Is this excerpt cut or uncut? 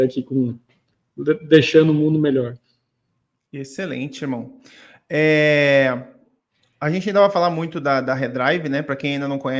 uncut